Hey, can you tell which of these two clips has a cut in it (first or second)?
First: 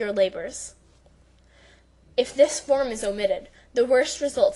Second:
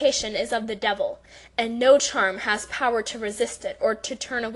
second